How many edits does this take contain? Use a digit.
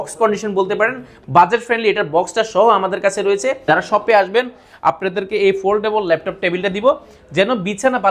1